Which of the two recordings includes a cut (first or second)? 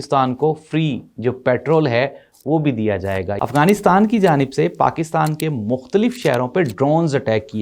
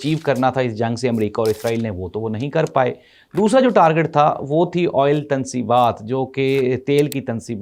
first